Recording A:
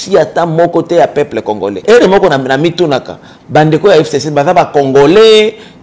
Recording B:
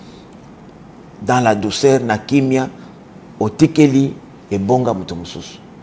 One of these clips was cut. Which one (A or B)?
A